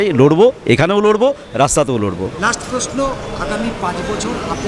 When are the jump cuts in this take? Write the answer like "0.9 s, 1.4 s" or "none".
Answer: none